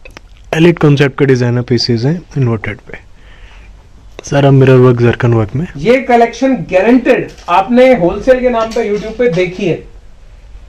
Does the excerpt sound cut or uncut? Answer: uncut